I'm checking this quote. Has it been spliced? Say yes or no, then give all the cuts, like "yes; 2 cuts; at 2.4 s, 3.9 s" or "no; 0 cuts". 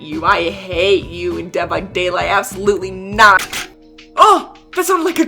yes; 1 cut; at 3.5 s